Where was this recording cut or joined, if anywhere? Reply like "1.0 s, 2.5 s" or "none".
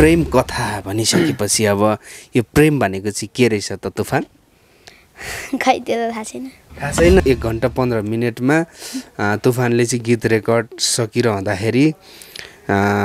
7.2 s